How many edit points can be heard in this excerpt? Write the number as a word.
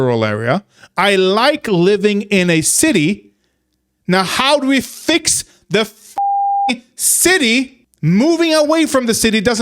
one